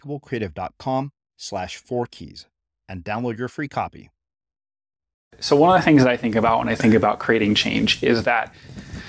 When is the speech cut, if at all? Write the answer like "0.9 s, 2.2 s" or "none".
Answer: 5.4 s